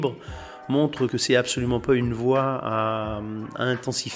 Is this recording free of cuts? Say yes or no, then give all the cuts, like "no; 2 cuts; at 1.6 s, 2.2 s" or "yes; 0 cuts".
no; 1 cut; at 1.1 s